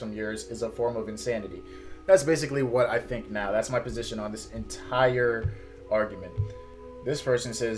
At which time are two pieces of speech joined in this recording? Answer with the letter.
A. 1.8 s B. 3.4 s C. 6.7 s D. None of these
D